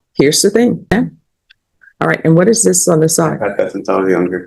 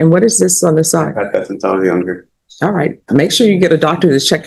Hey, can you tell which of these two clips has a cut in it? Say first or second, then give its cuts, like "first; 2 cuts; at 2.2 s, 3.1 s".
first; 1 cut; at 0.9 s